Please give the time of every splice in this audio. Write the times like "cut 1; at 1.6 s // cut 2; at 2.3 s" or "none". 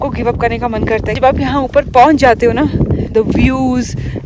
cut 1; at 1.1 s // cut 2; at 3.1 s